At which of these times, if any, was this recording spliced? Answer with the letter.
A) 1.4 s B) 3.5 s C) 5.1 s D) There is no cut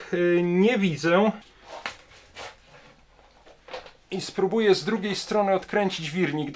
A